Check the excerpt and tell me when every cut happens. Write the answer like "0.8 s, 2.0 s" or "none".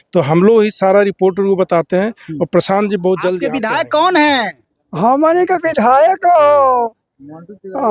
3.5 s